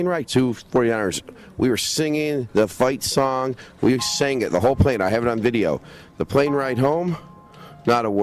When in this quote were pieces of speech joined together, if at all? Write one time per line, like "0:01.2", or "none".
0:03.6

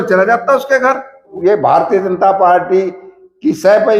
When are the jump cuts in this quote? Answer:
0:01.2

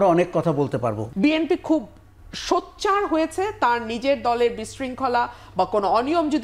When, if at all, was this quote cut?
0:01.0

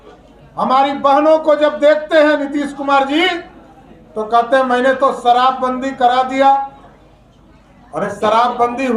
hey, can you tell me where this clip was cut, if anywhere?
none

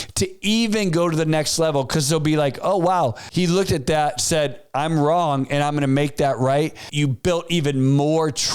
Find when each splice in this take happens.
0:03.2
0:06.9

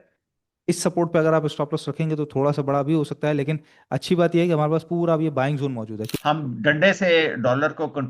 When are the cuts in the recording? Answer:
0:06.1

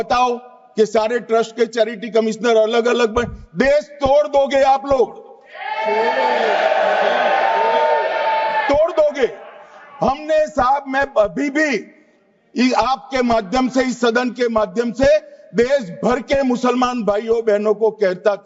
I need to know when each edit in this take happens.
none

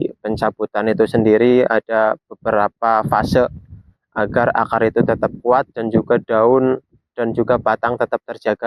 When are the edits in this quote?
none

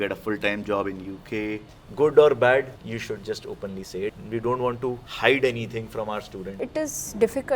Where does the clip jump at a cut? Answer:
0:01.8
0:02.8
0:04.1
0:05.1
0:06.6

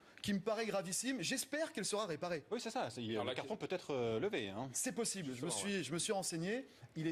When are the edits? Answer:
none

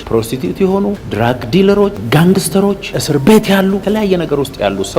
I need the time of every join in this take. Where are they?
0:02.0
0:03.0

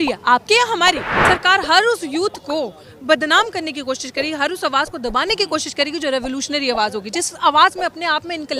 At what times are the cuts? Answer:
0:01.1

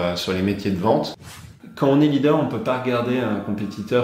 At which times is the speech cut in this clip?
0:01.3

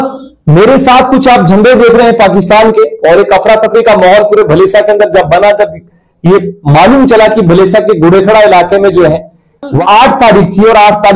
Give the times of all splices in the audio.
0:09.8

